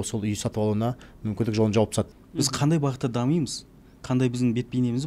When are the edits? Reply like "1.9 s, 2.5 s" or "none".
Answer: 2.1 s